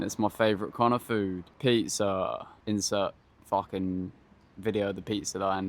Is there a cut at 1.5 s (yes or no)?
yes